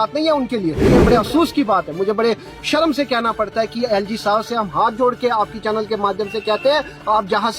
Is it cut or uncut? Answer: cut